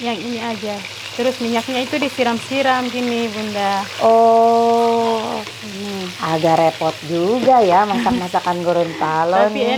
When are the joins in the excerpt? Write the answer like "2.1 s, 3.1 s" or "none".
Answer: none